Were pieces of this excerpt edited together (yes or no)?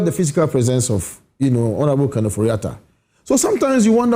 no